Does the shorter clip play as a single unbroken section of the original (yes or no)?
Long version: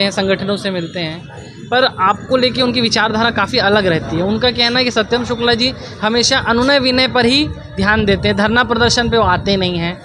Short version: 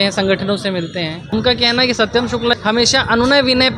no